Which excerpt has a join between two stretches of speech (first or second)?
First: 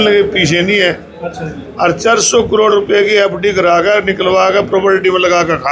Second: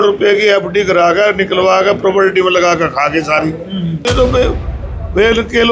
second